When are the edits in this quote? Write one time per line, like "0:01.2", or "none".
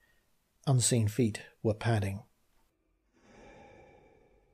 none